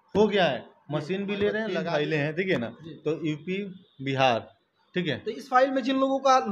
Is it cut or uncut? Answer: cut